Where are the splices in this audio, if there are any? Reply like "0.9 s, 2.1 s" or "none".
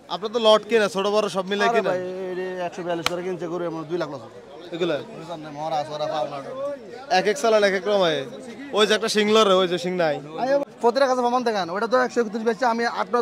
10.7 s